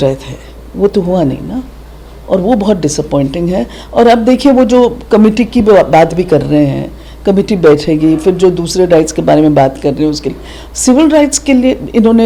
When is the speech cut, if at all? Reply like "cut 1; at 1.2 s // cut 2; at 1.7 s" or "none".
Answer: none